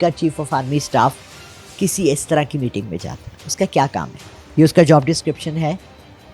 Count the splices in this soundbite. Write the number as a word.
zero